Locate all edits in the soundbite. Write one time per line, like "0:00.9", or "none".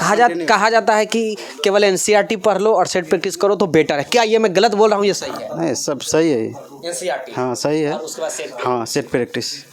none